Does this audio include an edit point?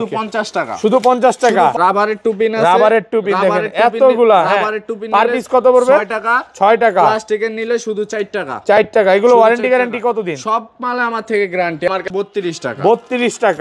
yes; 2 cuts; at 1.7 s, 11.9 s

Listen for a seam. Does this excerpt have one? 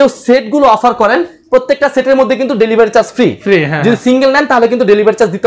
no; 0 cuts

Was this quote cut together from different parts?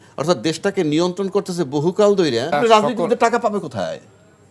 yes; 1 cut; at 2.6 s

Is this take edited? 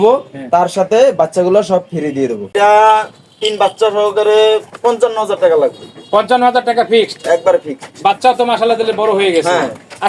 yes; 1 cut; at 2.5 s

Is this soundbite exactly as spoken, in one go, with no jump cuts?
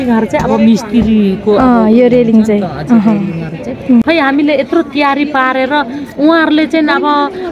no; 1 cut; at 4.0 s

